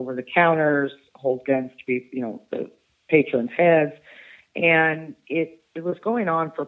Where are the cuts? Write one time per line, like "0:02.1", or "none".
none